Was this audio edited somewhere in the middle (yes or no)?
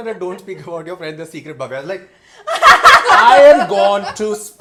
no